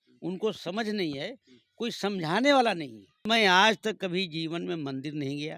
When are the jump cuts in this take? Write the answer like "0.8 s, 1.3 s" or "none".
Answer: 3.3 s